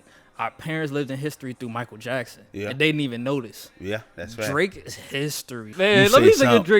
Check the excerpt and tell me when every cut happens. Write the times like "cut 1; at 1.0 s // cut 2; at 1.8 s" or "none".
cut 1; at 5.7 s